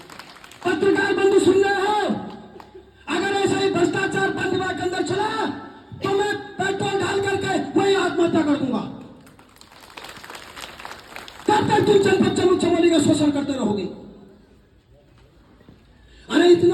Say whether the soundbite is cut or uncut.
uncut